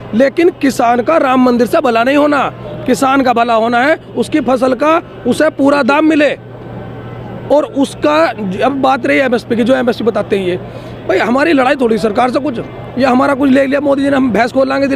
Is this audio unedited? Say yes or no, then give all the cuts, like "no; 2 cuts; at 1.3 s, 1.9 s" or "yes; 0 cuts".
yes; 0 cuts